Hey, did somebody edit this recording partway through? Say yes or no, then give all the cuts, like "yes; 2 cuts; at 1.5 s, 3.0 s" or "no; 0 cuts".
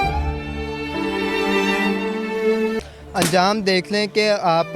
yes; 1 cut; at 2.8 s